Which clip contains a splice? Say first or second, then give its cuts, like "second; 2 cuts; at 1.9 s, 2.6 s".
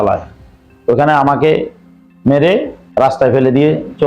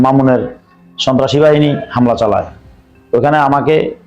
first; 1 cut; at 2.8 s